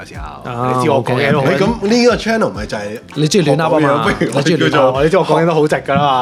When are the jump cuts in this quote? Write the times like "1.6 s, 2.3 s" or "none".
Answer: none